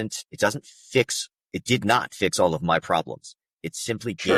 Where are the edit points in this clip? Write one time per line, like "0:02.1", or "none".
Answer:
none